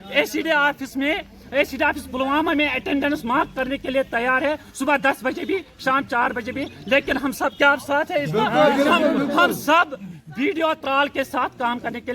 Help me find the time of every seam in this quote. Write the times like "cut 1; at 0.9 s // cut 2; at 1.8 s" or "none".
none